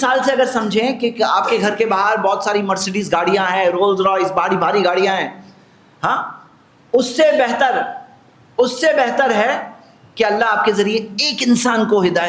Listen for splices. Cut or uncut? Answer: uncut